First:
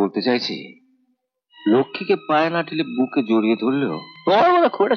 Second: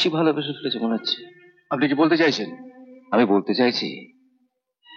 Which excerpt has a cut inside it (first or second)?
first